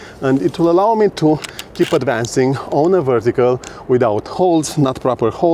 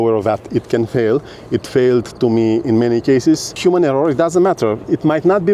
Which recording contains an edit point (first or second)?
second